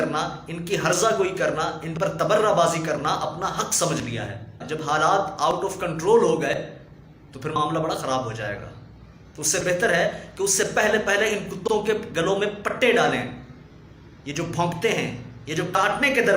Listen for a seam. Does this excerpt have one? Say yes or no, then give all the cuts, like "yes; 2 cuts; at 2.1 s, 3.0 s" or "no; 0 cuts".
yes; 1 cut; at 4.7 s